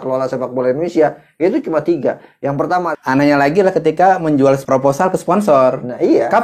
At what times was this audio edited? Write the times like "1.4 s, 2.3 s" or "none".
2.9 s, 4.6 s